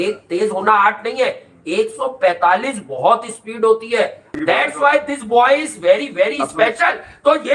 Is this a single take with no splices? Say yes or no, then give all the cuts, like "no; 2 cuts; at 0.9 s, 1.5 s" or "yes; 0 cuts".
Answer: no; 1 cut; at 4.3 s